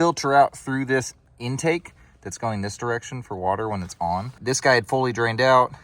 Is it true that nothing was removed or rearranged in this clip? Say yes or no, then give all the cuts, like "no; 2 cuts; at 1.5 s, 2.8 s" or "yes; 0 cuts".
no; 2 cuts; at 1.2 s, 4.4 s